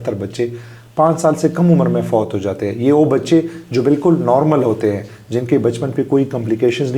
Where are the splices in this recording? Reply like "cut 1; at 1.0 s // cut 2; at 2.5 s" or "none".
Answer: none